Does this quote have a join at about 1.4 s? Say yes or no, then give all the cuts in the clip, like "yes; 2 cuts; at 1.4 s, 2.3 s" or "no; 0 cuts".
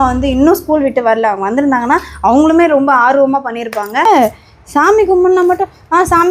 no; 1 cut; at 4.1 s